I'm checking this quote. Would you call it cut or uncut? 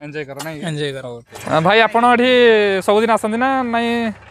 cut